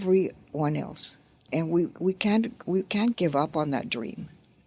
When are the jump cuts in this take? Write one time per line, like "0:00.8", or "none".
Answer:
0:01.4